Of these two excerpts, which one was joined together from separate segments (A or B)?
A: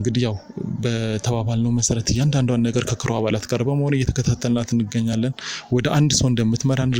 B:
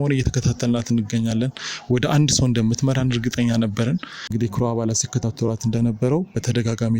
B